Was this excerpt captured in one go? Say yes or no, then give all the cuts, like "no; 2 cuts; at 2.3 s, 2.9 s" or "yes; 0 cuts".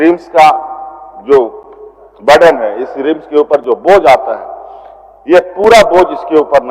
yes; 0 cuts